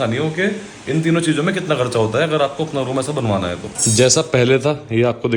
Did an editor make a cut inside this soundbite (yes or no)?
yes